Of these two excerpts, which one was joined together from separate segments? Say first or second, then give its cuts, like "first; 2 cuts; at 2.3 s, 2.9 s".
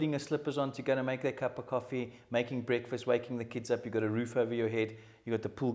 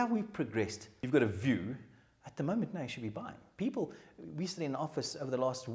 second; 1 cut; at 1.0 s